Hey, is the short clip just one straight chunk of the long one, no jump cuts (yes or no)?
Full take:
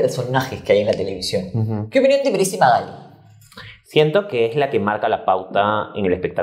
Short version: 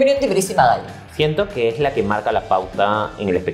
no